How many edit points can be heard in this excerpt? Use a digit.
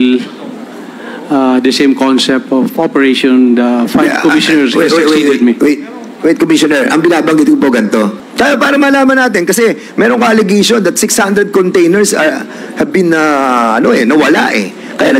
1